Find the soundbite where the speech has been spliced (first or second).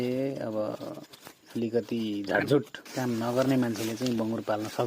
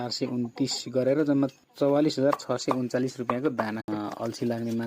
second